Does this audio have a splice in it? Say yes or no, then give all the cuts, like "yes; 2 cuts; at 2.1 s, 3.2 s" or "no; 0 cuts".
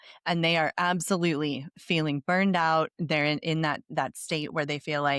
no; 0 cuts